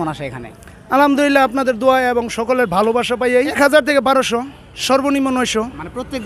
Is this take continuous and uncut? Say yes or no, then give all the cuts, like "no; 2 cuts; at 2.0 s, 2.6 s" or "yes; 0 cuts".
no; 1 cut; at 3.5 s